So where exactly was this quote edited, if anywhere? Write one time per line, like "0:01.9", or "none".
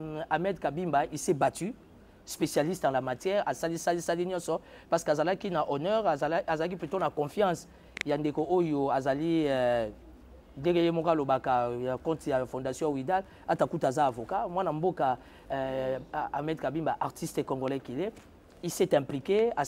none